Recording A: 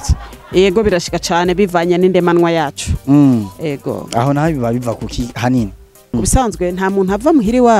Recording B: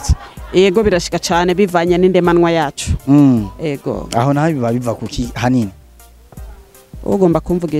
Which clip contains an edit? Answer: A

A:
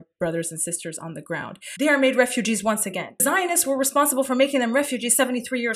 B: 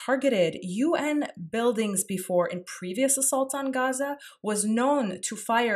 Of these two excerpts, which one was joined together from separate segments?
A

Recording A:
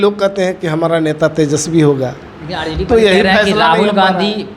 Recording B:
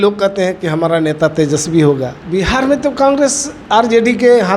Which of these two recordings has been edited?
B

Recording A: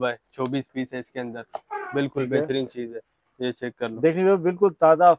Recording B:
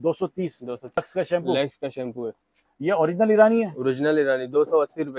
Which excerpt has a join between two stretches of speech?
B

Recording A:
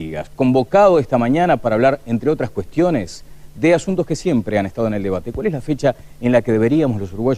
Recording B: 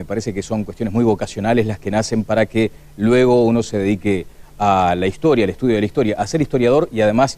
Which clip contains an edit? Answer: A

